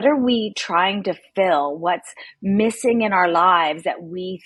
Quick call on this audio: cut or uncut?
uncut